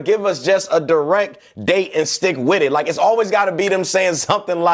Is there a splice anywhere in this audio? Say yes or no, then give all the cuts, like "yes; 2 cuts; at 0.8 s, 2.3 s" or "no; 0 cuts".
no; 0 cuts